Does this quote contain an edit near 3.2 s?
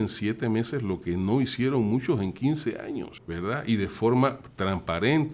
yes; 1 cut; at 3.2 s

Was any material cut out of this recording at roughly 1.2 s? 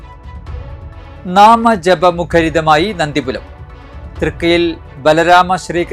yes; 1 cut; at 1.2 s

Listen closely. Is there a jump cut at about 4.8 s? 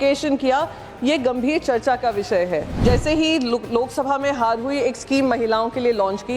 no; 1 cut; at 2.7 s

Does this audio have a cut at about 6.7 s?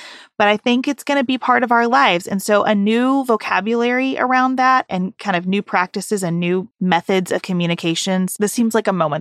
yes; 1 cut; at 6.7 s

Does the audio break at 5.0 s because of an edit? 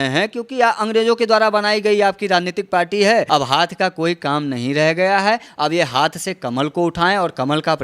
no; 1 cut; at 3.3 s

